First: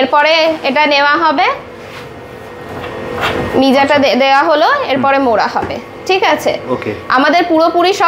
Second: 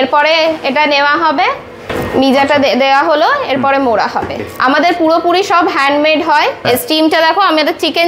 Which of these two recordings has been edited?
second; 3 cuts; at 1.9 s, 4.5 s, 6.6 s

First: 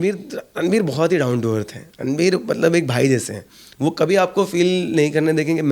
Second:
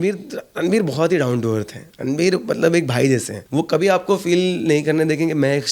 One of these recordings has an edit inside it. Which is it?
second; 1 cut; at 3.4 s

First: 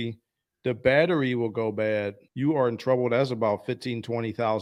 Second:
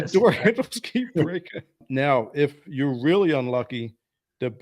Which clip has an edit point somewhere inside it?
second; 1 cut; at 1.8 s

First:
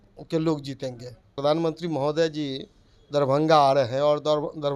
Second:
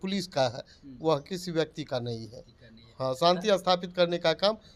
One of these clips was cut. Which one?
first; 1 cut; at 1.4 s

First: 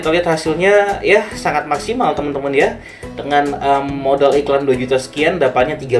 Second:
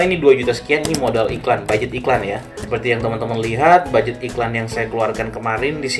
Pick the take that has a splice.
second; 1 cut; at 2.5 s

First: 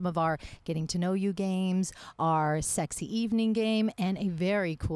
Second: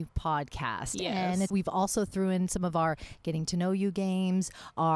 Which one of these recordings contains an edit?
second; 1 cut; at 1.5 s

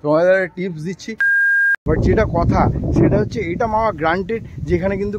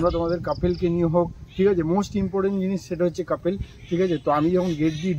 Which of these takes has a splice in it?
first; 1 cut; at 1.4 s

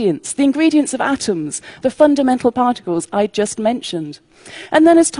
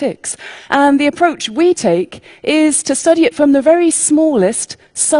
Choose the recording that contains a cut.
second; 1 cut; at 3.2 s

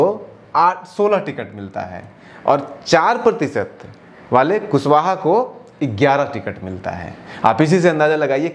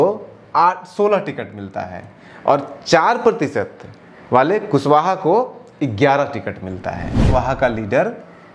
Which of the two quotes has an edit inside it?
second; 1 cut; at 7.2 s

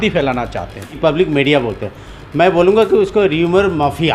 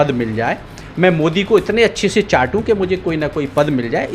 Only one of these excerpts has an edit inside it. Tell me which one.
first; 1 cut; at 0.9 s

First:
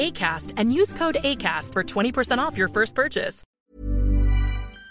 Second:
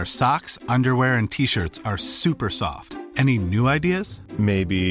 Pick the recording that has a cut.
first; 1 cut; at 3.5 s

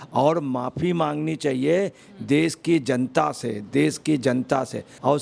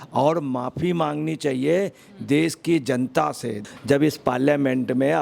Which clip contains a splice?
second; 1 cut; at 3.6 s

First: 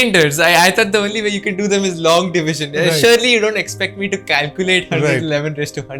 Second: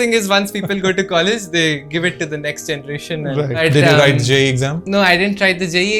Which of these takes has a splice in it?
second; 2 cuts; at 3.6 s, 4.8 s

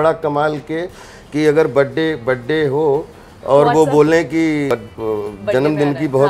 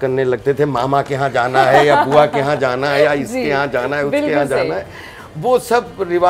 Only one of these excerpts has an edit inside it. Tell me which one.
first; 1 cut; at 4.7 s

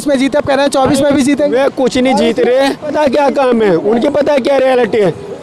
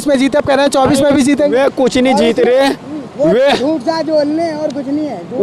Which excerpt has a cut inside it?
first; 1 cut; at 2.9 s

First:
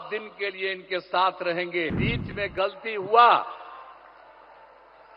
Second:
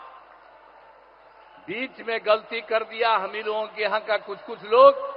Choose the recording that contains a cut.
first; 1 cut; at 2.0 s

